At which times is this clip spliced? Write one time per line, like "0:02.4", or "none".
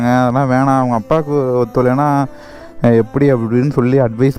none